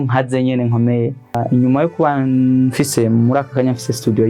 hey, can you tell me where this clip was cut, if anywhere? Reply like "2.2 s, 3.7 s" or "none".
1.4 s